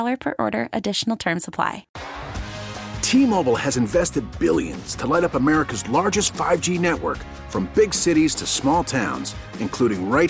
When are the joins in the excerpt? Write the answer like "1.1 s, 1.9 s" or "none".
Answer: 1.9 s

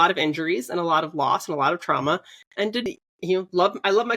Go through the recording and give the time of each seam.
2.8 s

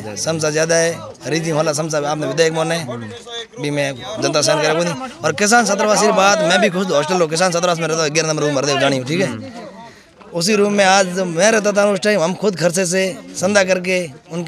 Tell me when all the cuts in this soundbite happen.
none

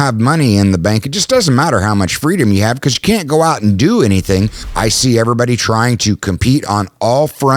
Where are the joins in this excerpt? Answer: 4.6 s

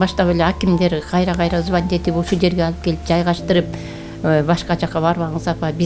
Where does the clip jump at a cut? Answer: none

